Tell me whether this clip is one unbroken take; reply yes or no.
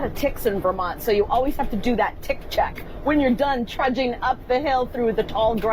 yes